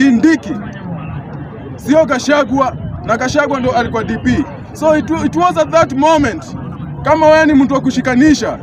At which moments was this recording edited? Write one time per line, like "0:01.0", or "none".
none